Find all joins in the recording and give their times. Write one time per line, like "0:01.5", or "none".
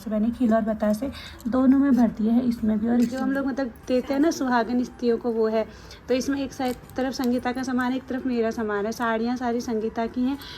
0:03.2